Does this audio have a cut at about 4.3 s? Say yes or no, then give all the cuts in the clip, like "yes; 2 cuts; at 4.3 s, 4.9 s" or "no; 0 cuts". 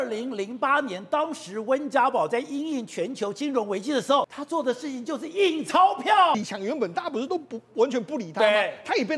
yes; 2 cuts; at 4.3 s, 6.3 s